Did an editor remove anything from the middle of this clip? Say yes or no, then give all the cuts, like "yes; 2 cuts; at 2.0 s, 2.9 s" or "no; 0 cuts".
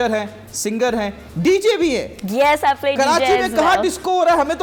no; 0 cuts